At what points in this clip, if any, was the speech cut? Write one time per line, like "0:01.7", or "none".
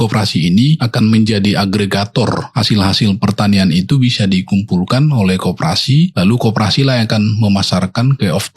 0:00.9
0:02.5
0:06.1